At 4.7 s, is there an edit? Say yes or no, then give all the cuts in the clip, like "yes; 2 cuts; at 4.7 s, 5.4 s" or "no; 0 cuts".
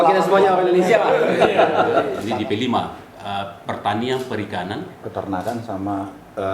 no; 1 cut; at 2.2 s